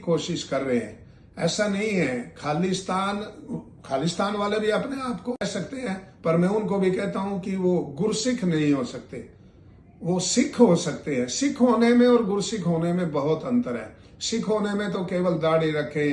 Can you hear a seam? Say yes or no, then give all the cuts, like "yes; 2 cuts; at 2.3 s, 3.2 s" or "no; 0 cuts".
no; 0 cuts